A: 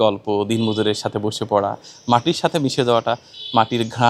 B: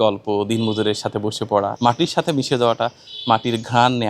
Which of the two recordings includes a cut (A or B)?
B